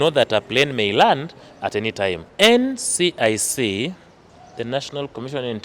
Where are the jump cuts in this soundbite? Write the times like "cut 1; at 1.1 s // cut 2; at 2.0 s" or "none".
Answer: cut 1; at 2.2 s